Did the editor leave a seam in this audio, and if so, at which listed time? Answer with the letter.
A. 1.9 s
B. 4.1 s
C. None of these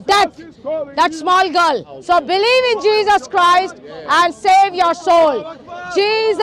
A